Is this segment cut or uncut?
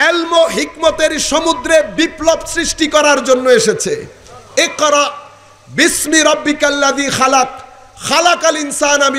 uncut